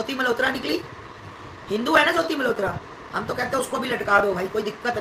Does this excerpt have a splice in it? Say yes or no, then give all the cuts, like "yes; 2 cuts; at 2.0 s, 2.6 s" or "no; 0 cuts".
no; 0 cuts